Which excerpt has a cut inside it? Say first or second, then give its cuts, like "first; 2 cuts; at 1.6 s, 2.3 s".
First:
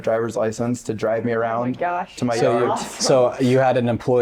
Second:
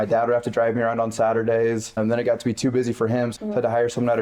second; 2 cuts; at 2.0 s, 3.3 s